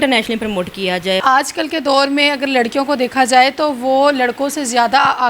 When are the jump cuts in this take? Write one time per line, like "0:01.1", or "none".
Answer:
0:01.2